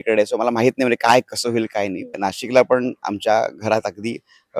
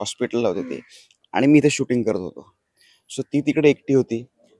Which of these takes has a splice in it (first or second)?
first